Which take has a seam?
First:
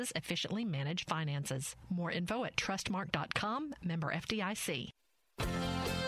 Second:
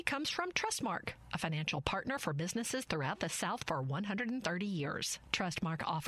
first; 1 cut; at 5.0 s

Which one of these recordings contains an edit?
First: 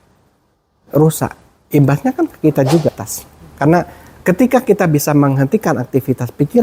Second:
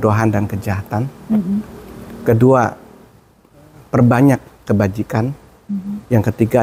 first; 1 cut; at 3.0 s

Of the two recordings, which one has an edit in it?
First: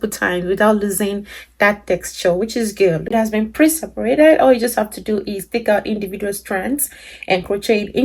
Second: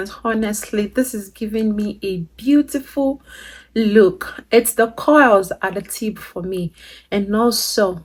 first; 1 cut; at 3.1 s

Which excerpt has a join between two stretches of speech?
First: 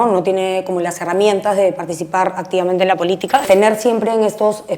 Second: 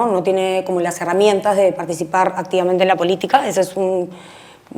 first; 1 cut; at 3.4 s

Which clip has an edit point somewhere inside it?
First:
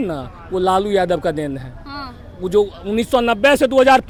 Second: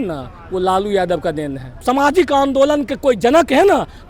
second; 1 cut; at 1.8 s

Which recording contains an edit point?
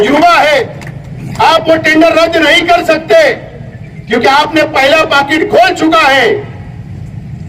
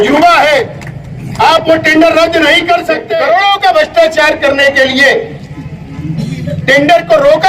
second; 1 cut; at 3.1 s

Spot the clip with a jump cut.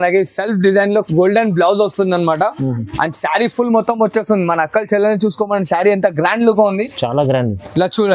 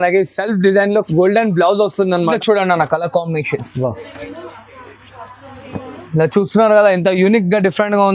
second; 1 cut; at 2.3 s

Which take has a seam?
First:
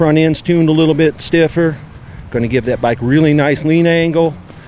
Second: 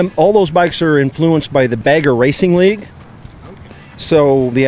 second; 1 cut; at 1.8 s

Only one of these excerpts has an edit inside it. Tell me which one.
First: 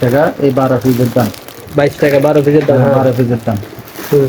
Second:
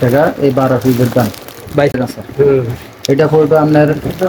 second; 1 cut; at 2.0 s

